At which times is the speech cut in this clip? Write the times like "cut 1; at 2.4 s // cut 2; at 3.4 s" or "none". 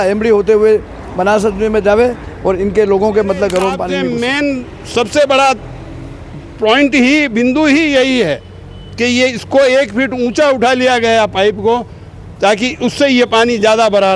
cut 1; at 4.1 s